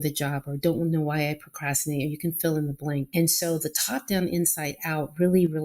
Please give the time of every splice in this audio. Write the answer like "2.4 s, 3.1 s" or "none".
3.1 s